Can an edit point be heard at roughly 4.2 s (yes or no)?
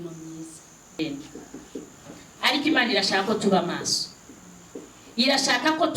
no